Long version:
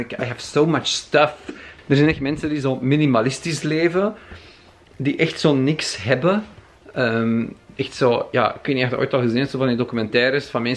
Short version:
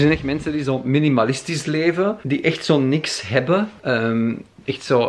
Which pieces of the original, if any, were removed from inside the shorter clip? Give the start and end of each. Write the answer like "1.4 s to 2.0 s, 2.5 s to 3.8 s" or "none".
4.2 s to 5.0 s, 6.5 s to 6.9 s